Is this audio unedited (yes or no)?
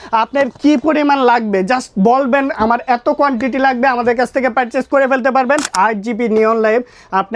no